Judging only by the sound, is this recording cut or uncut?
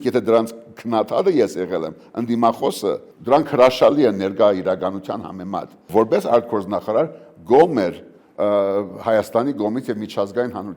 cut